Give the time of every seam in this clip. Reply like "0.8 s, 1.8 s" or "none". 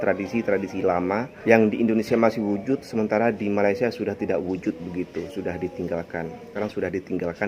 1.3 s, 6.5 s